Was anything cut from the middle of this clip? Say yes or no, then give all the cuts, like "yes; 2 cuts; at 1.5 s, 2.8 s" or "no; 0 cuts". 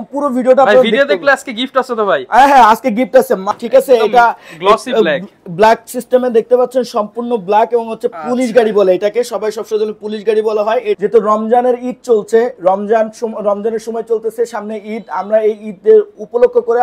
yes; 2 cuts; at 3.5 s, 11.0 s